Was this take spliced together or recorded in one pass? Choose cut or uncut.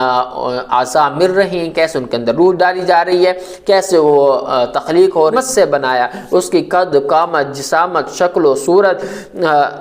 cut